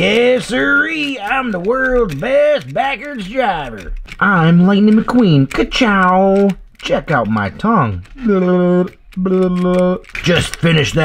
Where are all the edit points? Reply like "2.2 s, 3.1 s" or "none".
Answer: none